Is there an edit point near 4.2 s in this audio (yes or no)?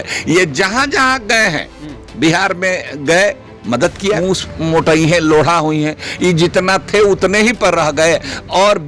yes